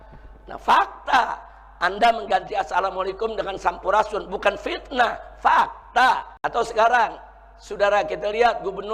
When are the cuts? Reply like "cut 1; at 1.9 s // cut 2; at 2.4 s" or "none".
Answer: cut 1; at 6.3 s